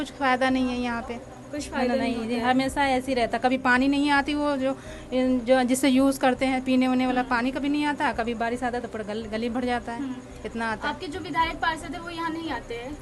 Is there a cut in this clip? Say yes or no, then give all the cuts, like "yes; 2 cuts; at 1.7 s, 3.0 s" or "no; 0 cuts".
no; 0 cuts